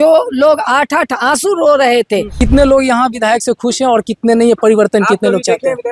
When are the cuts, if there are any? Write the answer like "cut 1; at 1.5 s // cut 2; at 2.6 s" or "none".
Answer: cut 1; at 2.3 s